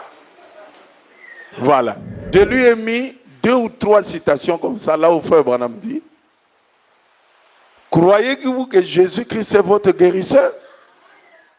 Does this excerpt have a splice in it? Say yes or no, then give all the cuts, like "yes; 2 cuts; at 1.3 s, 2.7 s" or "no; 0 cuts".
yes; 1 cut; at 2.1 s